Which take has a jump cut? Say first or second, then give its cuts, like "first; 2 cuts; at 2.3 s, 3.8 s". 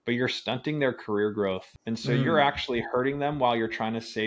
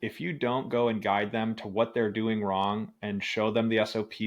first; 1 cut; at 1.7 s